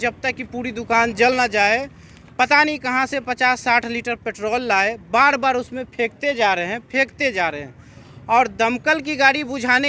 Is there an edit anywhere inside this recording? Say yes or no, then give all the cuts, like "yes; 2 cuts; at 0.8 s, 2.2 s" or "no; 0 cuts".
no; 0 cuts